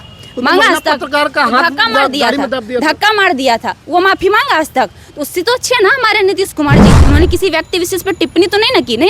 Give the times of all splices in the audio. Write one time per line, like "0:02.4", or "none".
0:06.9